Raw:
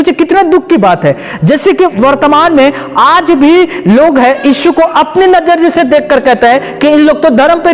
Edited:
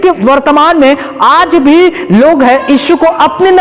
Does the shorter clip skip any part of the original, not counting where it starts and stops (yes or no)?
no